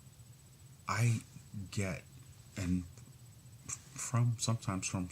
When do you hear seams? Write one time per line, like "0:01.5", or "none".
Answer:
0:01.7